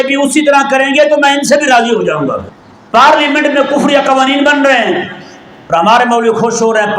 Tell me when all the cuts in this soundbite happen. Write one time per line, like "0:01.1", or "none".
0:02.5